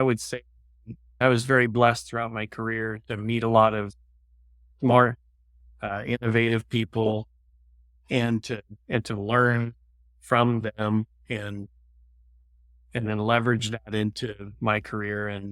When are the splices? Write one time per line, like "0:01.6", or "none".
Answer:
0:01.2